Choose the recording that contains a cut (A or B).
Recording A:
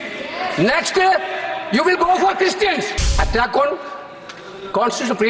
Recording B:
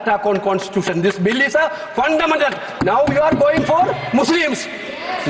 A